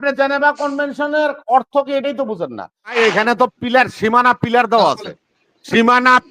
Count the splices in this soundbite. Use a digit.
1